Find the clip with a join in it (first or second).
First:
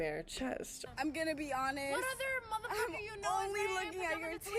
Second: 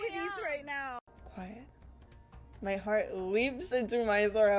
second